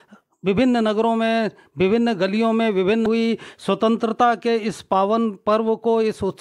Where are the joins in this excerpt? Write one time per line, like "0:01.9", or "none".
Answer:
0:03.1